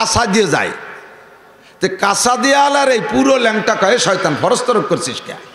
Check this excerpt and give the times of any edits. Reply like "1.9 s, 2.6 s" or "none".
none